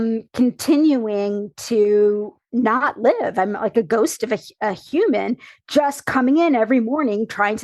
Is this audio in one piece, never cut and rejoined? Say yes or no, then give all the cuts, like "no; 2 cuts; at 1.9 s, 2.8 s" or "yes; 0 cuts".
no; 1 cut; at 2.4 s